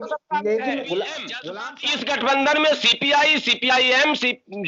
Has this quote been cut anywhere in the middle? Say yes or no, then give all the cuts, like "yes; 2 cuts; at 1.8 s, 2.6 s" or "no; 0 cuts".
yes; 1 cut; at 1.4 s